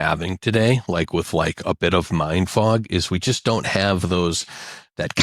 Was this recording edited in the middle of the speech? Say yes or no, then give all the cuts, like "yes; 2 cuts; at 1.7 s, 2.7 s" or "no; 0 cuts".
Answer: no; 0 cuts